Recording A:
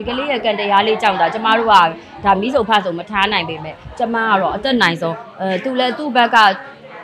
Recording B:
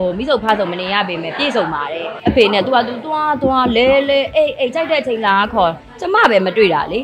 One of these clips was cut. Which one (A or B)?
B